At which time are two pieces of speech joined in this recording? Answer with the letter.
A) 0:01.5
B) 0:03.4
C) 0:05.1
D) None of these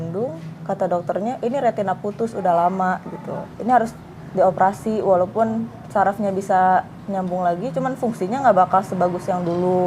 B